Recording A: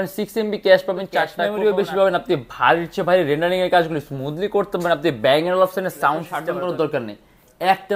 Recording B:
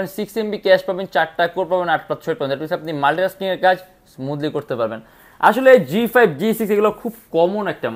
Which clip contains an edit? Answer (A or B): A